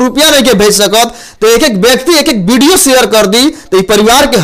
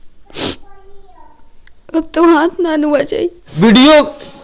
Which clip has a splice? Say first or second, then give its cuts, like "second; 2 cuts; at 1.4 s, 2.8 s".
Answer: second; 1 cut; at 3.4 s